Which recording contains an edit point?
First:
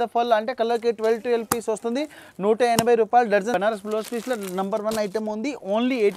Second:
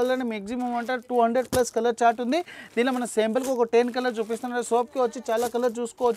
first; 1 cut; at 3.5 s

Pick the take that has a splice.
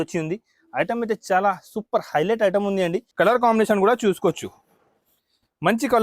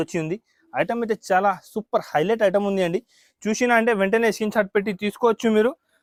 first; 1 cut; at 3.0 s

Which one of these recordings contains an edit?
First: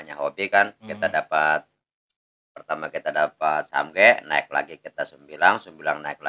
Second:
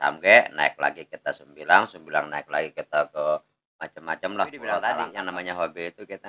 second; 1 cut; at 5.1 s

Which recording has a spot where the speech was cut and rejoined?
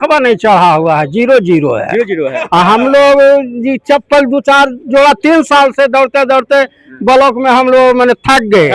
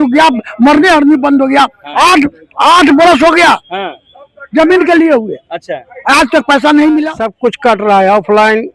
second; 1 cut; at 7.2 s

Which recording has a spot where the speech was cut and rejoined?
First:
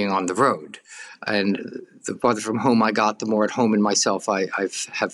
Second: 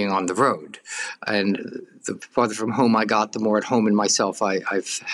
first; 1 cut; at 2.1 s

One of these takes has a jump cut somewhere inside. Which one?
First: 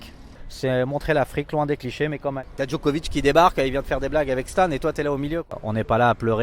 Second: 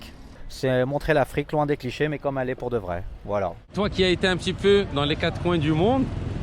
first; 2 cuts; at 2.4 s, 5.5 s

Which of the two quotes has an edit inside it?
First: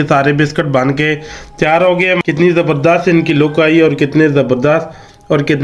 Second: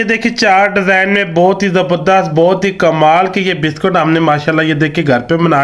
first; 1 cut; at 2.2 s

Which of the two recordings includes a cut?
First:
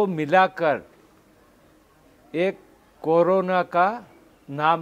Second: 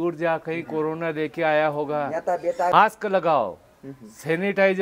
second; 1 cut; at 2.7 s

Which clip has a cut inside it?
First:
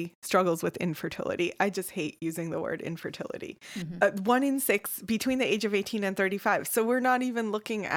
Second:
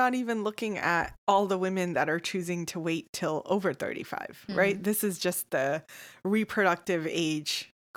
first; 1 cut; at 3.8 s

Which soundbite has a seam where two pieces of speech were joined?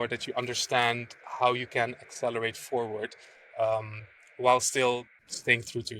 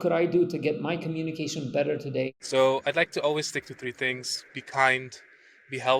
second; 1 cut; at 2.3 s

